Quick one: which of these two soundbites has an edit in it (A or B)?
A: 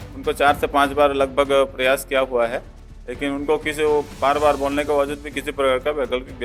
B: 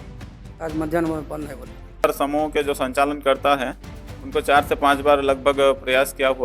B